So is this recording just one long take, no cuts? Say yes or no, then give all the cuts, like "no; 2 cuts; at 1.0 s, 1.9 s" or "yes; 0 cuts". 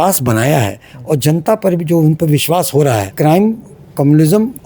no; 1 cut; at 3.1 s